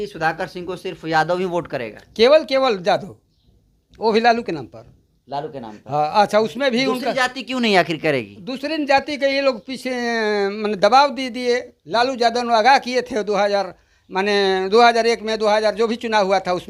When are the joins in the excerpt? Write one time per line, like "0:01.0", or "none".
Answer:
none